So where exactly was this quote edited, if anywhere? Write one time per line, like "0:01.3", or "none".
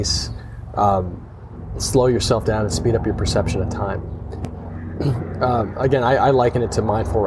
0:04.6